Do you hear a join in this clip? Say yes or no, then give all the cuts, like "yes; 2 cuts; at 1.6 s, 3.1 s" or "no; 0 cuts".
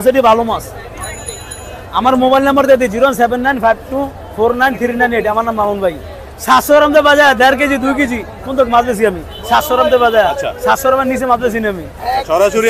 no; 0 cuts